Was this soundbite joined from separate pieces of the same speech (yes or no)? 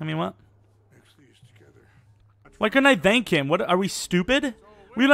no